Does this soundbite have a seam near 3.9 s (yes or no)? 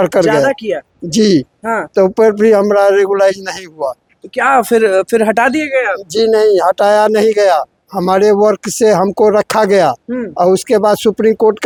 no